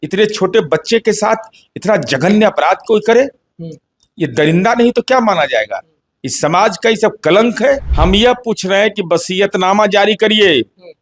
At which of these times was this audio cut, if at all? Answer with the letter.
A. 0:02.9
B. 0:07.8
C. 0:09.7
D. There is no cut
B